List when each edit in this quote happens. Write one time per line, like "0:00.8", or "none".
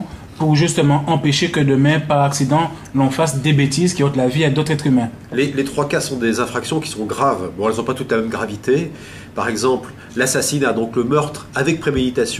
0:09.6